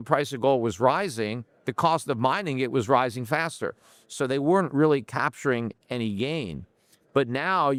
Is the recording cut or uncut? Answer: uncut